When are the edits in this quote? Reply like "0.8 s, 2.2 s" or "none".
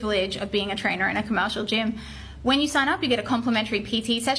2.0 s